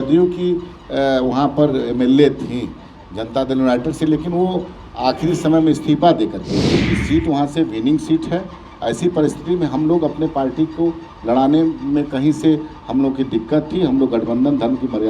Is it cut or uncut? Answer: cut